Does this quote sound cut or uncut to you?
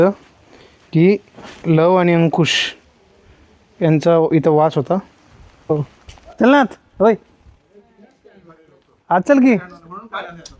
uncut